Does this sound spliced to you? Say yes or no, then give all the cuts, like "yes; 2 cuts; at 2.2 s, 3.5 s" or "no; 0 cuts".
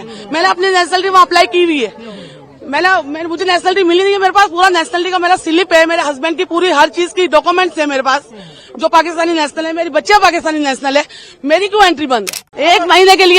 yes; 1 cut; at 12.4 s